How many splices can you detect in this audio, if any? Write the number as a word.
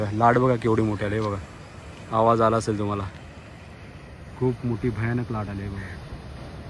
zero